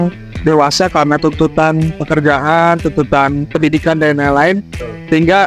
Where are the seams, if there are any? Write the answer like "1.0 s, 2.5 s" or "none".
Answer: none

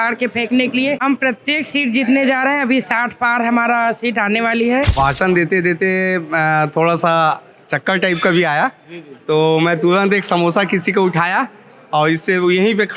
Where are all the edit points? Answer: 1.0 s, 4.9 s

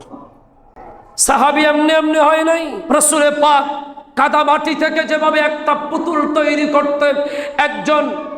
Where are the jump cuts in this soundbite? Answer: 2.8 s

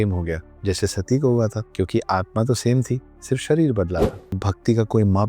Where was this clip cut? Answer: 1.6 s, 4.2 s

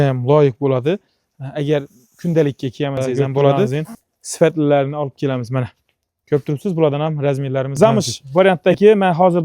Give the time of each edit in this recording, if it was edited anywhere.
3.7 s, 7.7 s

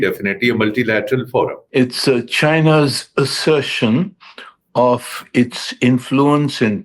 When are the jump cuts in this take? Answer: 1.6 s

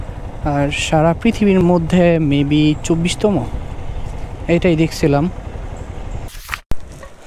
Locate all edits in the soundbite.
6.4 s

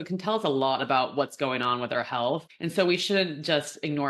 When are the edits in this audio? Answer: 2.6 s

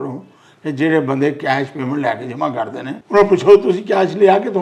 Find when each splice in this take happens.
2.9 s

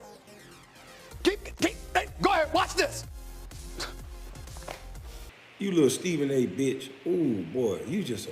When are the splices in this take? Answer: 5.4 s

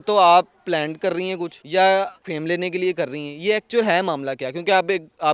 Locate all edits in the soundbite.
1.5 s, 2.2 s

